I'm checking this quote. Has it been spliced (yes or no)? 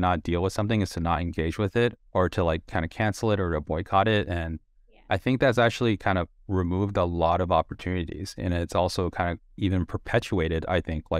yes